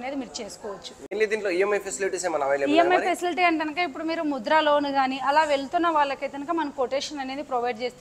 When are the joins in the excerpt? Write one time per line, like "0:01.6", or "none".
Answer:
0:01.1